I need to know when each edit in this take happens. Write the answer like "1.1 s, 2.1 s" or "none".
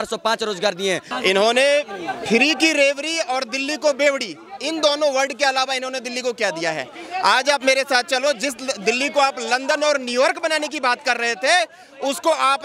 1.1 s